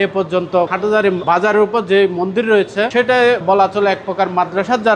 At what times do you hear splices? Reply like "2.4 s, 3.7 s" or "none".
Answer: 1.2 s